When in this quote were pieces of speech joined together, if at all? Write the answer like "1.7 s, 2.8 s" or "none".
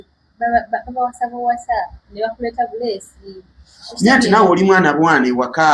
none